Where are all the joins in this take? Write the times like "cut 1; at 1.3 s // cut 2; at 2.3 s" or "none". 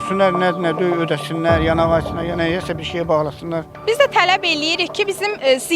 cut 1; at 3.7 s

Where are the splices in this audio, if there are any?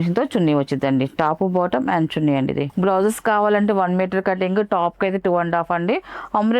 cut 1; at 2.7 s

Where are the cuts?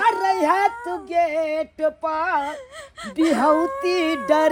none

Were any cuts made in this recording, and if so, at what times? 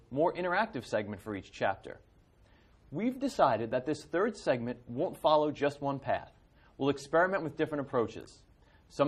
none

